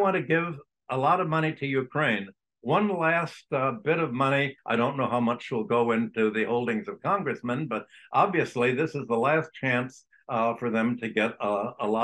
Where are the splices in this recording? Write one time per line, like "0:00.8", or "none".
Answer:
0:04.6